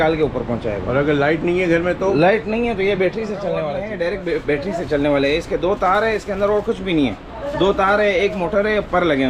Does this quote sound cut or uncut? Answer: cut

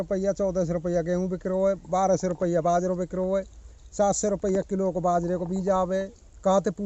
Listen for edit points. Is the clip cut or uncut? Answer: uncut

